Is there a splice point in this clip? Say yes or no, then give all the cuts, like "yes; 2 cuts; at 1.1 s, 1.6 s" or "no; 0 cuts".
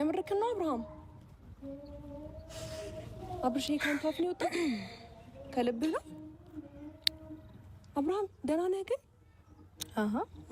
no; 0 cuts